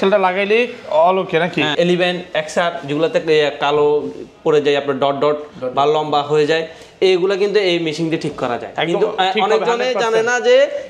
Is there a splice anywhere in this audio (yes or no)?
yes